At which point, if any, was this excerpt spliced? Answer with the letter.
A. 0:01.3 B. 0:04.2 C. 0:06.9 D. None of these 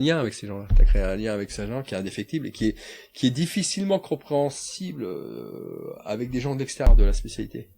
C